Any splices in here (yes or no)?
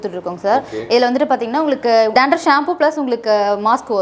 yes